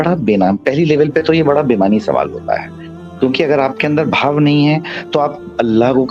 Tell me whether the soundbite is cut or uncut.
uncut